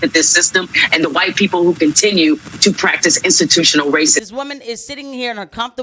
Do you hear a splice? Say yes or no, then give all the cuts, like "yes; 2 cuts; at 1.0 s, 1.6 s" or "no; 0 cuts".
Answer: yes; 1 cut; at 4.2 s